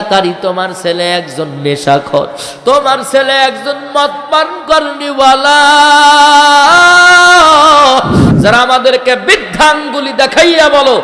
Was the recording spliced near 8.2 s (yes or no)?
yes